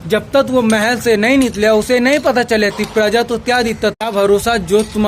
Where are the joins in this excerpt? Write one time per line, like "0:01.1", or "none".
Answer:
0:04.0

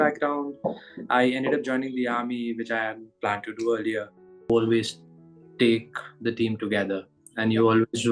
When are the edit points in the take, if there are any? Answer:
0:04.5

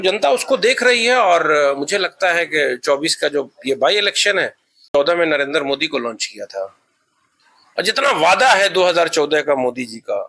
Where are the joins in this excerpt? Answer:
0:04.9

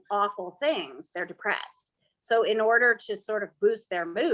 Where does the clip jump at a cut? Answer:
none

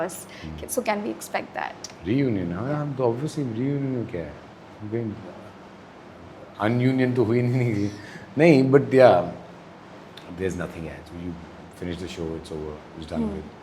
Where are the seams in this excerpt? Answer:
none

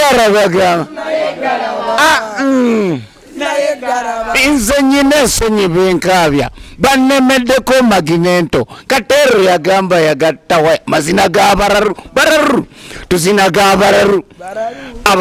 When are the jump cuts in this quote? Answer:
none

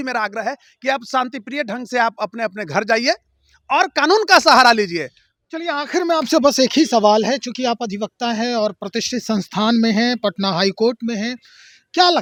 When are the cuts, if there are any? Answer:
none

